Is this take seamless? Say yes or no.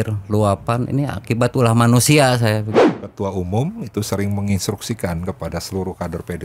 no